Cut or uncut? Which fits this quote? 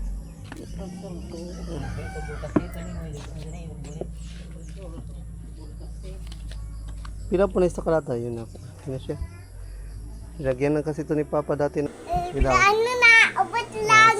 cut